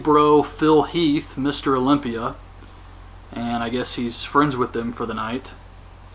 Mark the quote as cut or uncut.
uncut